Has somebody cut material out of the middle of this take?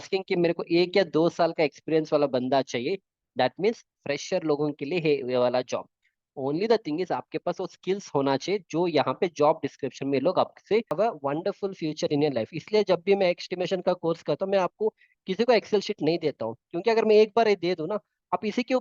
yes; 1 cut; at 10.9 s

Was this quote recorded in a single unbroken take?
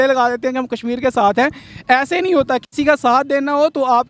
yes; 0 cuts

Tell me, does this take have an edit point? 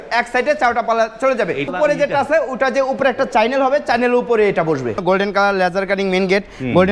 yes; 2 cuts; at 1.7 s, 5.0 s

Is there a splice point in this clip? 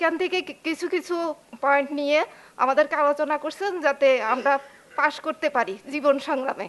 no; 0 cuts

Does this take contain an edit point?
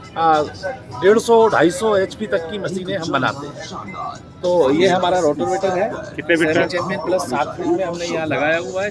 no; 0 cuts

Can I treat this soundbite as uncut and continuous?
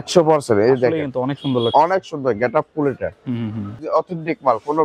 no; 1 cut; at 3.8 s

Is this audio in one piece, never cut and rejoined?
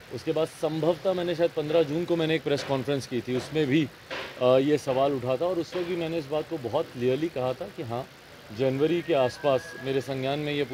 yes; 0 cuts

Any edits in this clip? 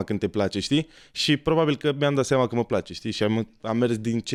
no; 0 cuts

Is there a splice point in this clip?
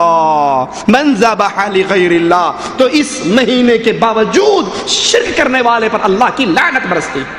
no; 0 cuts

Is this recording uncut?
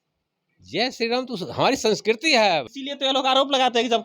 no; 1 cut; at 2.7 s

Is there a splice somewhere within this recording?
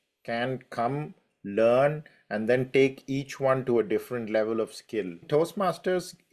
yes; 1 cut; at 5.2 s

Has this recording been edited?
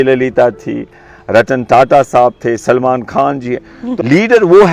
yes; 1 cut; at 3.8 s

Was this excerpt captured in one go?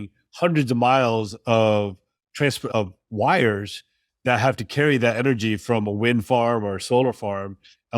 yes; 0 cuts

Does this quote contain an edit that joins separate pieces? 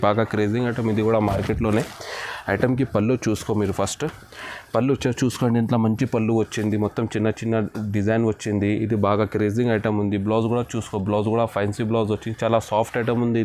no; 0 cuts

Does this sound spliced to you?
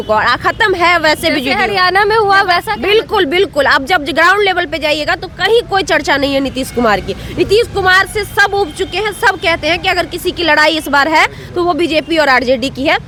no; 0 cuts

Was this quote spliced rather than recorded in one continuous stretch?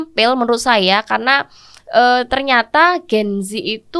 no; 0 cuts

